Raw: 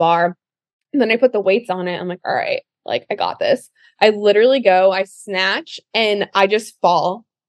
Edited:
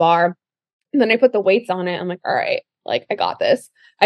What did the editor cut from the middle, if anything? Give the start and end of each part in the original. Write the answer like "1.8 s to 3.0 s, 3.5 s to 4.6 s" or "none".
none